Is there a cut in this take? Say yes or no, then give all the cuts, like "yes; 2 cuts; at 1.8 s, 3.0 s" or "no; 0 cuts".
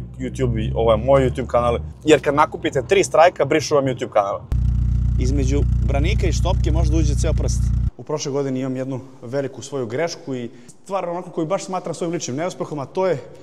yes; 3 cuts; at 1.9 s, 4.6 s, 7.9 s